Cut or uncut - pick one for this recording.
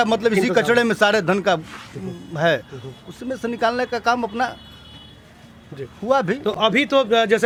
uncut